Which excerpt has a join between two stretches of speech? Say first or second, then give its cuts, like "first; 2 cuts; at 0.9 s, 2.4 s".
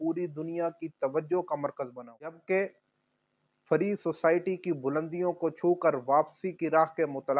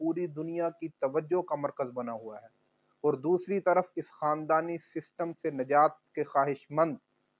first; 1 cut; at 2.4 s